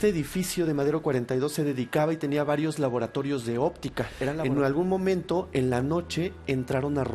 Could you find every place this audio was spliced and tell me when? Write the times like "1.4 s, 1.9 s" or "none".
4.4 s